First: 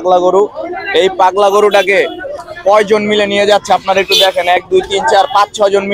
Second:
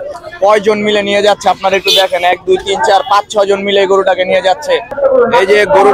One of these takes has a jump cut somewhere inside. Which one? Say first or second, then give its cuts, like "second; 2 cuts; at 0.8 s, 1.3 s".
second; 1 cut; at 5.0 s